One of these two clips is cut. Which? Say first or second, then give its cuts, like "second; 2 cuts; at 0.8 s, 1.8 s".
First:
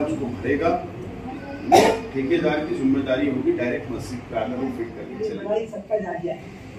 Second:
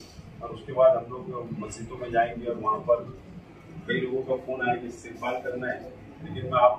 first; 1 cut; at 5.1 s